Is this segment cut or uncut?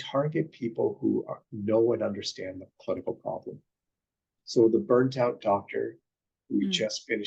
uncut